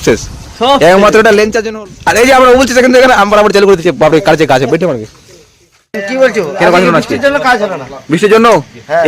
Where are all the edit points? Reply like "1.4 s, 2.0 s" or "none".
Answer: 1.6 s, 6.0 s